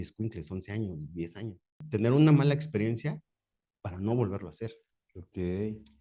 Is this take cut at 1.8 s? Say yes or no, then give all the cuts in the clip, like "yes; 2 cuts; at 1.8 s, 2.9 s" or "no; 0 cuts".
yes; 1 cut; at 1.8 s